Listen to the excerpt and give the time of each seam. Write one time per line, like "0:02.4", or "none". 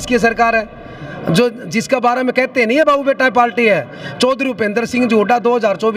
none